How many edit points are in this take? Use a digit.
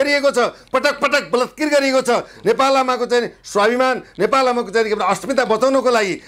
0